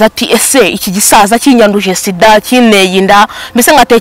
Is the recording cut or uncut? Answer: uncut